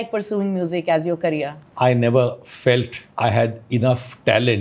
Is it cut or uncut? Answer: cut